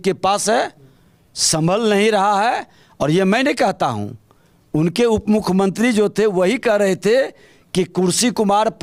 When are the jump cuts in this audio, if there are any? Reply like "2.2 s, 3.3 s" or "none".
none